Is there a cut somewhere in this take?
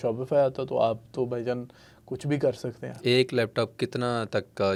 no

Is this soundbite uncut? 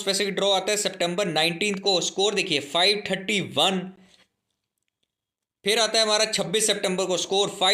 yes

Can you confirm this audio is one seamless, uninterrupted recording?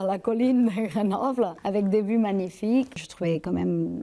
yes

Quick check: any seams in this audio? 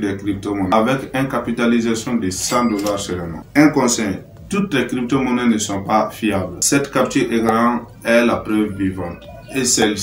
no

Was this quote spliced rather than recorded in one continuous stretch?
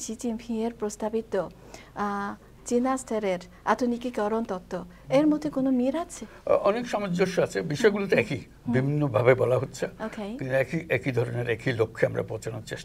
no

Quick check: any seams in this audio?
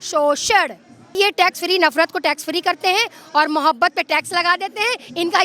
yes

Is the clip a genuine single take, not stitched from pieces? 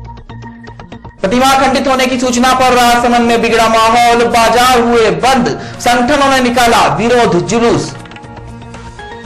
no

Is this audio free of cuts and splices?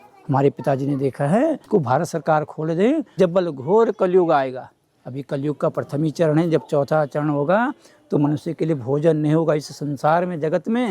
no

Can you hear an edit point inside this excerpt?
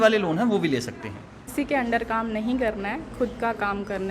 yes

